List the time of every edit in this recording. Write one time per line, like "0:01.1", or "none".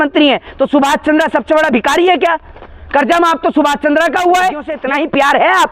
0:04.7